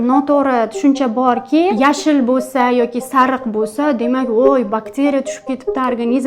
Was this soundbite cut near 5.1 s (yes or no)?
no